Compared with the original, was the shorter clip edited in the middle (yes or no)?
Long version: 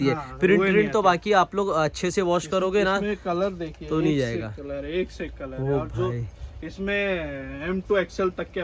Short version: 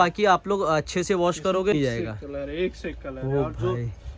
yes